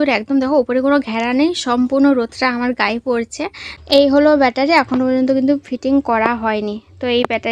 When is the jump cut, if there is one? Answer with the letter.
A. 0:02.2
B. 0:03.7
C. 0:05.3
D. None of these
B